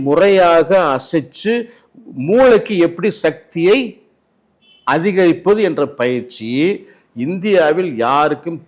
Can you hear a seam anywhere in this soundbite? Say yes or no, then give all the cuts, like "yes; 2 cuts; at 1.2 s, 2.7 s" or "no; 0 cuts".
no; 0 cuts